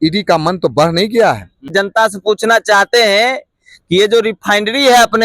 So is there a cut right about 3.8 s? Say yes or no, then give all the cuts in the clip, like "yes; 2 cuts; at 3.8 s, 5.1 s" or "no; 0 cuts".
no; 1 cut; at 1.7 s